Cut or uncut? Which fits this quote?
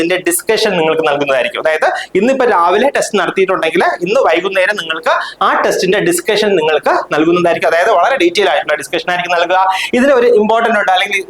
uncut